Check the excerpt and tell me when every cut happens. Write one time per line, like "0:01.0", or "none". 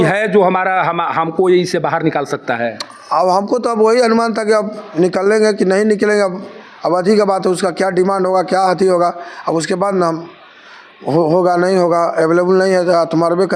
none